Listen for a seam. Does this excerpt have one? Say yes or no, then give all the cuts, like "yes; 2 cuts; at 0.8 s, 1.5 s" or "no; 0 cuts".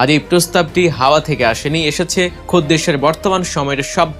yes; 1 cut; at 2.4 s